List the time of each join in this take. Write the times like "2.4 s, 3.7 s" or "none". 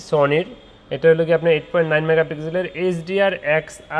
none